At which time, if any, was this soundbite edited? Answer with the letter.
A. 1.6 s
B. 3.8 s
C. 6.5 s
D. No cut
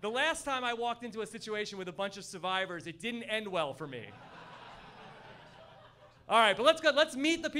B